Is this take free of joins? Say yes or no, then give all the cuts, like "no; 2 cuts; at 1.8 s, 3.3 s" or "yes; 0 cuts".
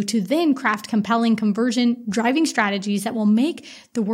yes; 0 cuts